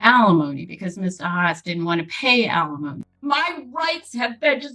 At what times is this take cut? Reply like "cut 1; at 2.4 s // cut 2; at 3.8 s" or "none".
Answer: cut 1; at 3.1 s